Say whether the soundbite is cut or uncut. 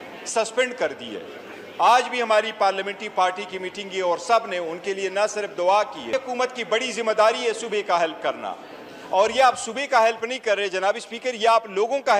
cut